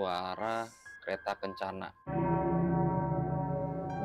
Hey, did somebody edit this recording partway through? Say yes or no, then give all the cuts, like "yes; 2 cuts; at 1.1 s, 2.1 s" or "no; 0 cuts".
yes; 1 cut; at 1.0 s